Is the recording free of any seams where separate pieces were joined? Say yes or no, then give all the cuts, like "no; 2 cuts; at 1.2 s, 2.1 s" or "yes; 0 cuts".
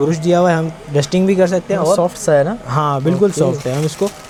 yes; 0 cuts